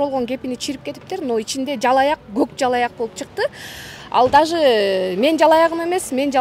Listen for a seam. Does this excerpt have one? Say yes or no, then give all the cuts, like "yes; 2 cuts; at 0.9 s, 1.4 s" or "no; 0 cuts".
no; 0 cuts